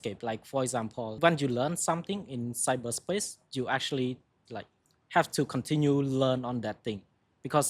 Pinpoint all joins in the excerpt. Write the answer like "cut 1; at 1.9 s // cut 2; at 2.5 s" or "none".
cut 1; at 1.1 s